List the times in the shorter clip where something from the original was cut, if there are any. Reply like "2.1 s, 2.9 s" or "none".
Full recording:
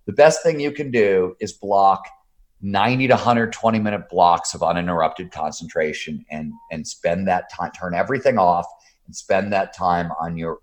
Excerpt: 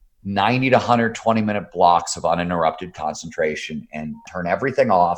4.3 s

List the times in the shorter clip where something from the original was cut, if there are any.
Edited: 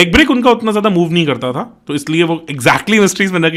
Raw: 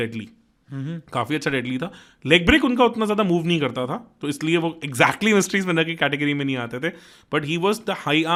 none

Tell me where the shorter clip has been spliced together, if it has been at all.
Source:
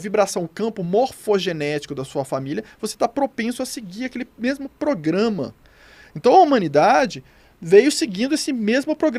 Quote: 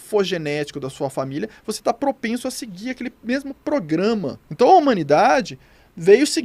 4.4 s

